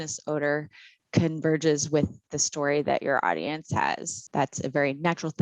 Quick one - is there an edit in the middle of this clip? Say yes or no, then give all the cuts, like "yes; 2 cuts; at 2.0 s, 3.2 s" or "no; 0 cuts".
yes; 1 cut; at 4.2 s